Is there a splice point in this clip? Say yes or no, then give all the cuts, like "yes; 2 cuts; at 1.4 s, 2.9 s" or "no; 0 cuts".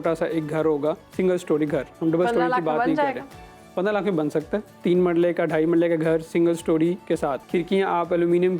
yes; 1 cut; at 7.4 s